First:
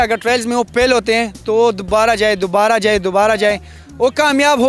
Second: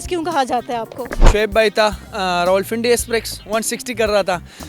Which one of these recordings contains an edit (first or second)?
second